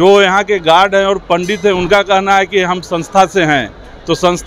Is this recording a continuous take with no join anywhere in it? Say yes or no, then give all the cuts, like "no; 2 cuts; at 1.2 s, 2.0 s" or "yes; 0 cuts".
yes; 0 cuts